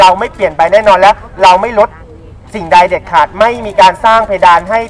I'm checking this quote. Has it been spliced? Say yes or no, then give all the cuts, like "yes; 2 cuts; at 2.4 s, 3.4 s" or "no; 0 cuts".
no; 0 cuts